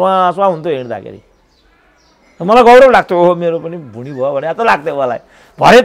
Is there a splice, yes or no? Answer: no